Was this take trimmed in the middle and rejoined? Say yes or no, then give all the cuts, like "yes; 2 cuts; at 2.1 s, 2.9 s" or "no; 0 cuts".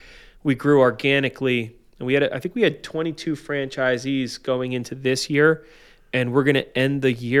no; 0 cuts